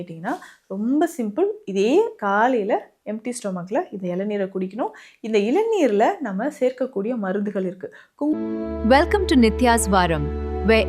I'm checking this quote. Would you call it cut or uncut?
cut